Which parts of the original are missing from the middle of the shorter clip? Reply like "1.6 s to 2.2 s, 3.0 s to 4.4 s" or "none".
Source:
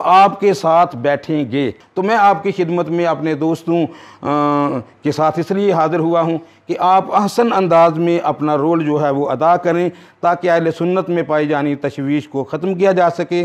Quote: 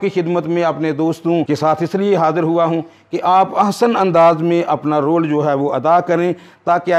3.9 s to 5.0 s